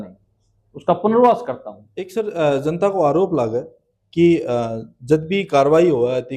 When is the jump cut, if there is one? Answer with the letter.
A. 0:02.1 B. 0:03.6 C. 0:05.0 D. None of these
A